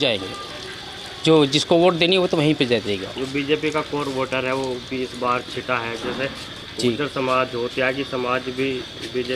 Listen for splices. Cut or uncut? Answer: uncut